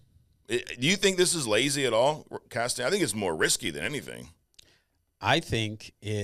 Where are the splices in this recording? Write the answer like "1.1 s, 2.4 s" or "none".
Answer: none